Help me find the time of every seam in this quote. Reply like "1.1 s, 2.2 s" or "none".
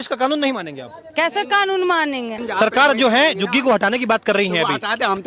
2.4 s